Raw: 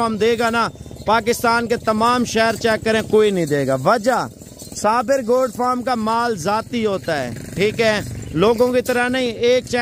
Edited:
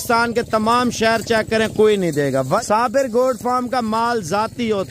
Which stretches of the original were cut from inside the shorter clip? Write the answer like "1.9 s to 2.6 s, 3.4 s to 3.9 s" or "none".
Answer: 4.0 s to 4.8 s